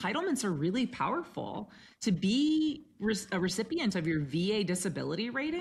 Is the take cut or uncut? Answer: uncut